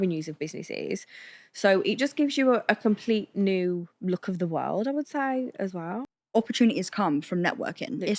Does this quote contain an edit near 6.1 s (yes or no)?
yes